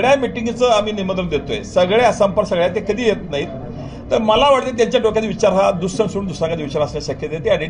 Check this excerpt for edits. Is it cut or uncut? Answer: uncut